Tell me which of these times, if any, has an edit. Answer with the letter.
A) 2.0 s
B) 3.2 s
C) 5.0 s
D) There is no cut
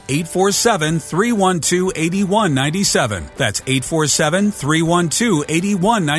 B